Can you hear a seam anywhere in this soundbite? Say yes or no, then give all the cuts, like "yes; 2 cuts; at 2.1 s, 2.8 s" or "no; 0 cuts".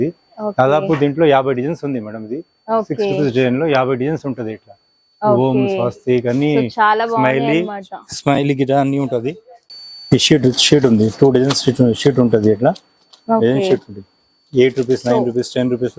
yes; 1 cut; at 9.7 s